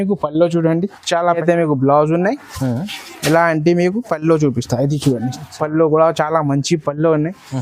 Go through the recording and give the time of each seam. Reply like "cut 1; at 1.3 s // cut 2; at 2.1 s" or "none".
cut 1; at 1.4 s